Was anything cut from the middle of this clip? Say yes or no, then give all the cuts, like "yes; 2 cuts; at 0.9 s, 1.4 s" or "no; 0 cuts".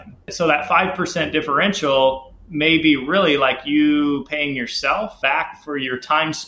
yes; 1 cut; at 5.1 s